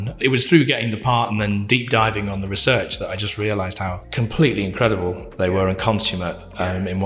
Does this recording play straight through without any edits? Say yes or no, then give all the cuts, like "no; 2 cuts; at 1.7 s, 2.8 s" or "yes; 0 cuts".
no; 2 cuts; at 1.6 s, 4.0 s